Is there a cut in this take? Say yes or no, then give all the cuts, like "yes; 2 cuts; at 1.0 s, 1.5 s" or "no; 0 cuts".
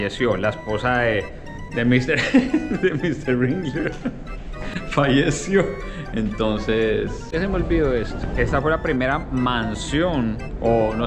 no; 0 cuts